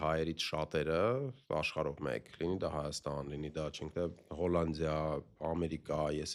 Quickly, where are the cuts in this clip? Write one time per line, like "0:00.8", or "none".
none

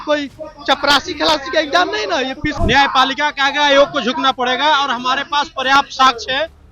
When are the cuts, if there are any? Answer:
0:02.6

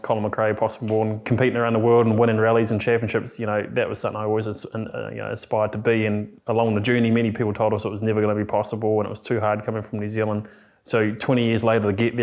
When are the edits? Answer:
0:01.2
0:06.3

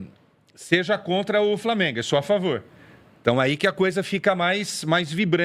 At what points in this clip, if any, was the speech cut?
none

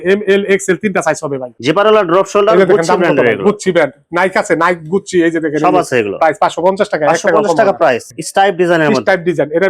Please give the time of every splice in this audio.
0:01.5
0:08.0

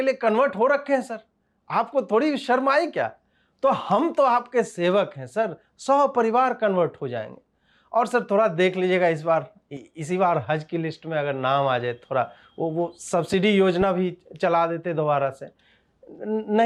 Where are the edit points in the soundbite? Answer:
none

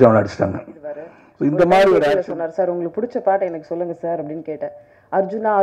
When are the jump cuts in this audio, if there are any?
0:02.1

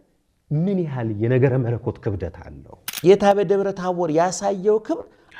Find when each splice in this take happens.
0:02.9

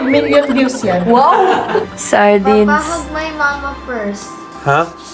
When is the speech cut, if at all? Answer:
0:02.0

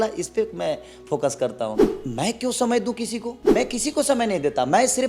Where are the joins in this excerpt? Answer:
0:01.8
0:03.5

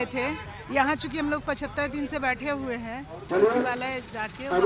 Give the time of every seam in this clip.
0:03.2

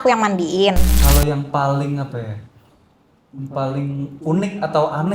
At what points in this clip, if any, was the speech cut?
0:00.9

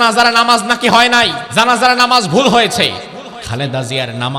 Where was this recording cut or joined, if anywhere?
0:01.4
0:03.4

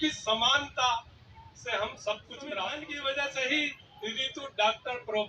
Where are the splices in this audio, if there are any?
0:02.9

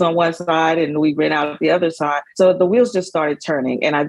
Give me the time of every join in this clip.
0:02.2

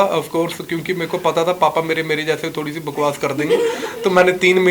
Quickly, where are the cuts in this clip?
none

